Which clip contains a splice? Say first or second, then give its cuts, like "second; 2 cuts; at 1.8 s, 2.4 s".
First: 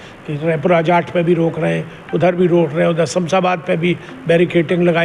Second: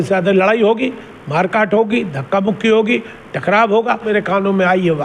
second; 1 cut; at 4.1 s